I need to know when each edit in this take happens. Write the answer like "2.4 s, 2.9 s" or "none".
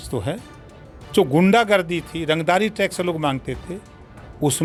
none